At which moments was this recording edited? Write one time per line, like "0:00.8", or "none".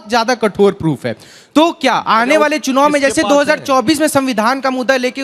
none

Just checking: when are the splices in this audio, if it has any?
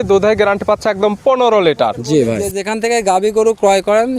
0:02.5

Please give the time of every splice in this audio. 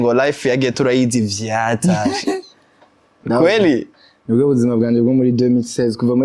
none

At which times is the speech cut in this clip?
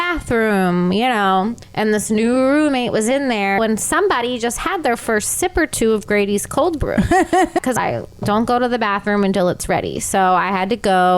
0:01.6
0:03.6
0:07.6

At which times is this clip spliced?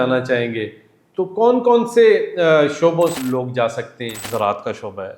0:03.2
0:04.2

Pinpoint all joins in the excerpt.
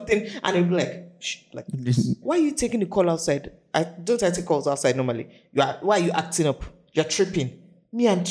0:02.2
0:03.5

